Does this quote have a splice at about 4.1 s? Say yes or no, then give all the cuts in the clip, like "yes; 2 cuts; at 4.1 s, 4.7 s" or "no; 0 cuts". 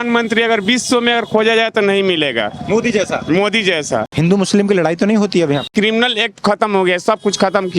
yes; 2 cuts; at 4.1 s, 5.7 s